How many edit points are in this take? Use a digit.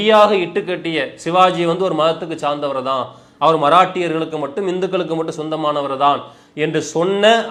0